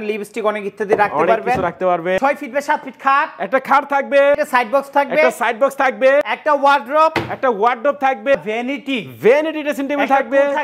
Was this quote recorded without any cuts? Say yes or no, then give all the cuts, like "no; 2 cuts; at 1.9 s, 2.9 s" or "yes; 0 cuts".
no; 4 cuts; at 2.2 s, 4.4 s, 6.3 s, 8.3 s